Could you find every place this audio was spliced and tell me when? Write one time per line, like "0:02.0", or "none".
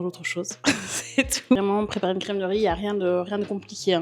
0:01.6

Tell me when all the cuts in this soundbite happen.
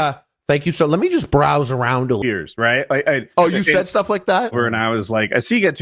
0:02.2
0:04.5

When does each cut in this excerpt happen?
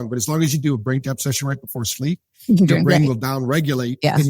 none

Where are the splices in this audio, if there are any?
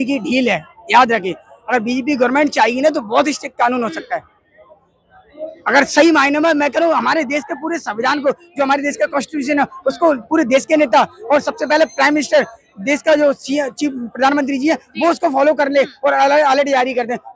none

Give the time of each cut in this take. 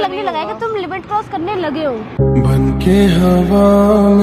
none

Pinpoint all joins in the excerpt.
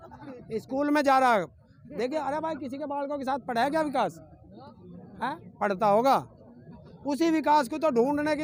none

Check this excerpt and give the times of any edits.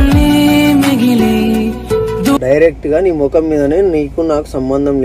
0:02.4

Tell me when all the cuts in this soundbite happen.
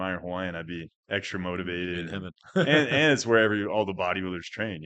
none

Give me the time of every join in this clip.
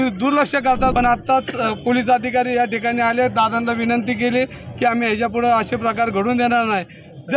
0:00.9

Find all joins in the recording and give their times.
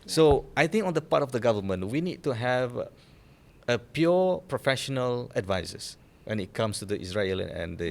none

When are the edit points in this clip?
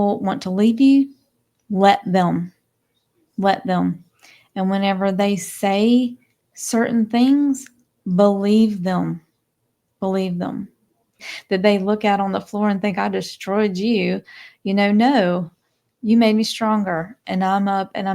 0:11.3

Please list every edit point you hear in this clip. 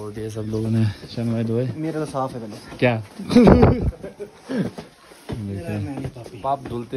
none

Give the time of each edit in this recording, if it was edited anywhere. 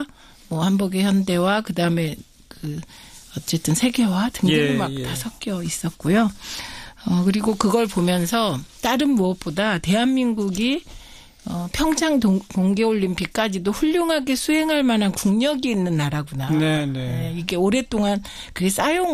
0:02.4

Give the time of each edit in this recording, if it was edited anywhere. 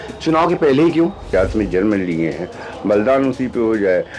0:01.3

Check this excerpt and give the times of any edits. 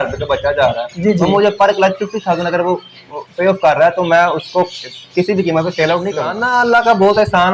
0:06.3

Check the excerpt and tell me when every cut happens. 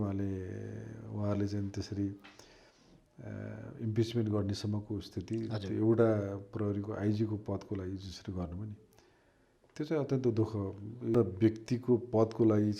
0:11.1

